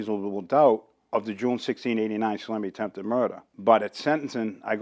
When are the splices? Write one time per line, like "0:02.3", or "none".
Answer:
0:03.5